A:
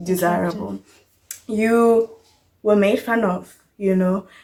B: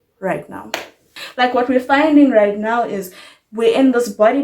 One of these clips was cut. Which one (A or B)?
B